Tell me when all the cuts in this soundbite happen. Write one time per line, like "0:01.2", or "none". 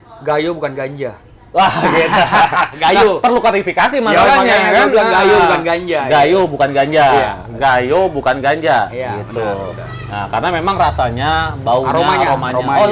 none